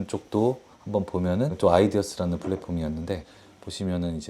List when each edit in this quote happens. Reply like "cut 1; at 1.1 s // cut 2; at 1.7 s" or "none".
cut 1; at 1.5 s // cut 2; at 3.2 s